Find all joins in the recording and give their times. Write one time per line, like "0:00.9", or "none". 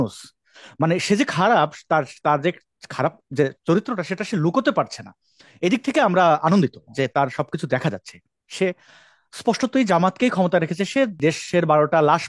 0:11.2